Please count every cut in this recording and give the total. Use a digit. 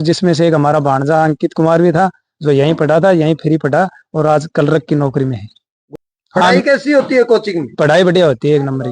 0